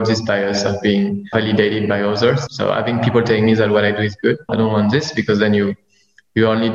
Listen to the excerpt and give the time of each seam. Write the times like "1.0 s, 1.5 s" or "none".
1.3 s, 2.4 s, 4.5 s